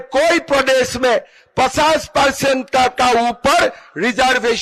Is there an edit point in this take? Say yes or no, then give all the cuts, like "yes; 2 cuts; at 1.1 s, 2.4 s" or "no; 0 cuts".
no; 0 cuts